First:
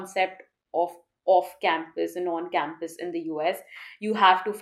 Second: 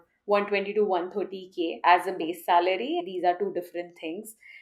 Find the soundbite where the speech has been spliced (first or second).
second